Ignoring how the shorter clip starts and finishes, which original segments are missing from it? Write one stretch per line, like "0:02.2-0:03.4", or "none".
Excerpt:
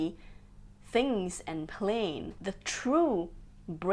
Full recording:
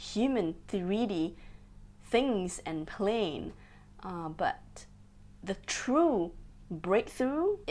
0:03.5-0:05.3